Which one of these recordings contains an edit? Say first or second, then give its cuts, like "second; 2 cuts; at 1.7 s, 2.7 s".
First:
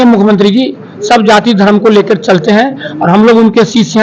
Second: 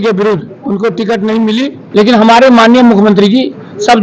second; 1 cut; at 1.8 s